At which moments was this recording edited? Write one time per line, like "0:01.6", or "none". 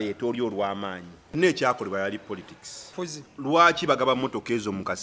0:01.3
0:02.9